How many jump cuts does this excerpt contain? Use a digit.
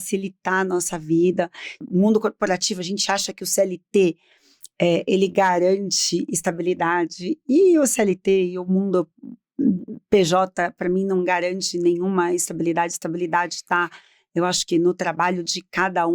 1